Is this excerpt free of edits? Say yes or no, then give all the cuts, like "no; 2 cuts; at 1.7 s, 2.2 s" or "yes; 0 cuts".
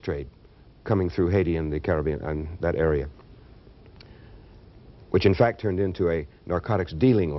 yes; 0 cuts